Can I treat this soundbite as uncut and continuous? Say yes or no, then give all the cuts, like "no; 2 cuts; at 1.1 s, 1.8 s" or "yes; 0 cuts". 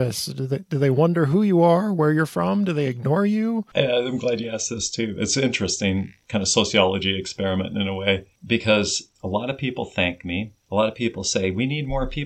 no; 5 cuts; at 3.7 s, 6.2 s, 8.3 s, 9.0 s, 10.6 s